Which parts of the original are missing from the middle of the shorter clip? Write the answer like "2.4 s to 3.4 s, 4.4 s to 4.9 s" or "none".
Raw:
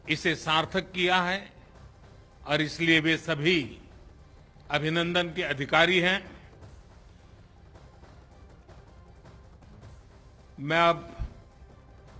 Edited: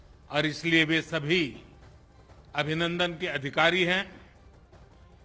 6.4 s to 8.2 s